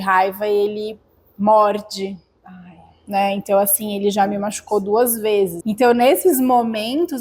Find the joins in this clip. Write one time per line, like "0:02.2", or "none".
0:05.6